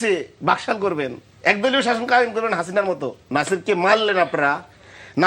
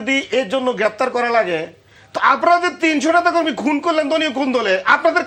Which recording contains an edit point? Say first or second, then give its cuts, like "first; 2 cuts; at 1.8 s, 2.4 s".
first; 2 cuts; at 1.2 s, 3.3 s